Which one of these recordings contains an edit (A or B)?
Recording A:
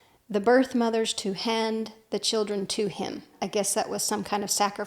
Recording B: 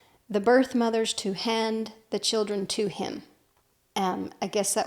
A